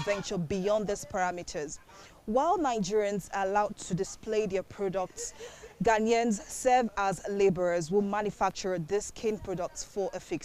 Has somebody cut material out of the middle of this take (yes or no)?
no